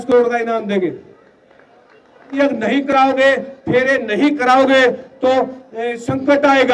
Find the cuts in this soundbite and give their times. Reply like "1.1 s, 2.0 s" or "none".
2.4 s